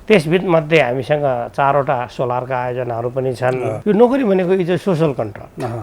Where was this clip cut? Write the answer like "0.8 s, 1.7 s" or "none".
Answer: 3.7 s